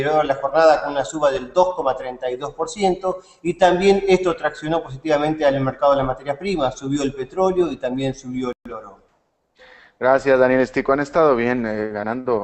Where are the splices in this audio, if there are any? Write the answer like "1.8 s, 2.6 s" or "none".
6.2 s